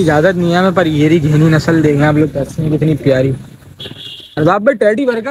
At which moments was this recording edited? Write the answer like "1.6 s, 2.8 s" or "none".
none